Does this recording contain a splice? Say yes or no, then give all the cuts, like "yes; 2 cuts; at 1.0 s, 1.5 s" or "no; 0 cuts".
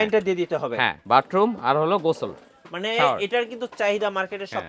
yes; 1 cut; at 1.0 s